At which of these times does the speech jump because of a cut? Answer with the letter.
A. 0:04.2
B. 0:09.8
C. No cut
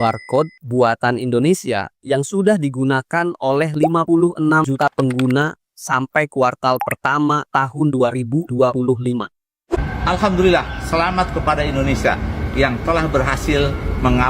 B